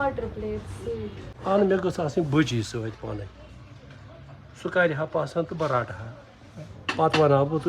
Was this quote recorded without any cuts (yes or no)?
no